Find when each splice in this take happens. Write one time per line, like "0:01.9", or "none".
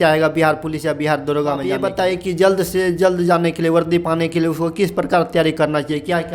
0:01.8